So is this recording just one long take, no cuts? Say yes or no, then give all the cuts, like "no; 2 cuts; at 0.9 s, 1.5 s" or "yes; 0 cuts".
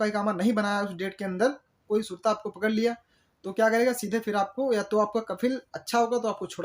no; 1 cut; at 1.8 s